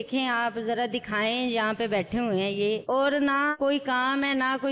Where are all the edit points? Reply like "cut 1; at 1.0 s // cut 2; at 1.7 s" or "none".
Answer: none